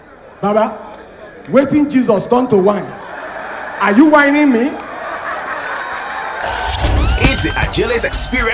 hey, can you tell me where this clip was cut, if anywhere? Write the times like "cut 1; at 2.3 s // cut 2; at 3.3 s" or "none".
cut 1; at 7.0 s

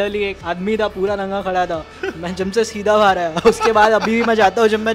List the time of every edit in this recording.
none

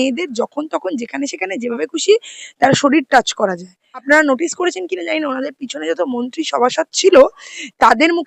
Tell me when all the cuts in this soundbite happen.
cut 1; at 4.0 s

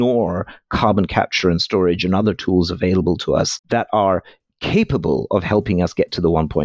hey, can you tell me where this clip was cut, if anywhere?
none

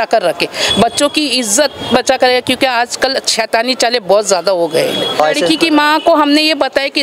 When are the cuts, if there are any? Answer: cut 1; at 5.2 s

